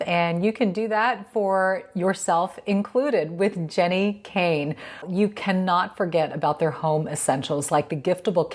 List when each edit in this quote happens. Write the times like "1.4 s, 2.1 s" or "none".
5.0 s